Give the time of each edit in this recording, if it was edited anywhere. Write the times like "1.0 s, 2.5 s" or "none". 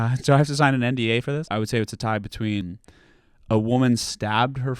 1.5 s, 2.6 s